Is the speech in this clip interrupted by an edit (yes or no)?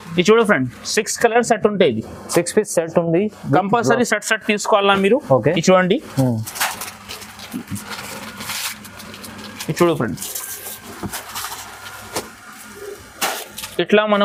no